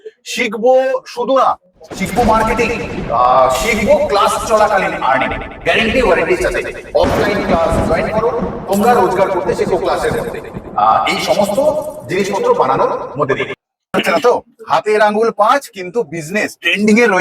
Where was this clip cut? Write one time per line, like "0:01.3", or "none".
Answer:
0:13.9